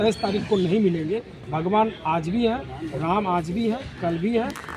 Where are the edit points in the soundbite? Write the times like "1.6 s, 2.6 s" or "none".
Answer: none